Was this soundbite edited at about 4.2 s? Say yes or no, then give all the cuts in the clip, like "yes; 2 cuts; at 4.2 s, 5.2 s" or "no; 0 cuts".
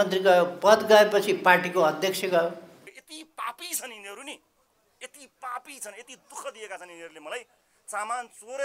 no; 1 cut; at 3.0 s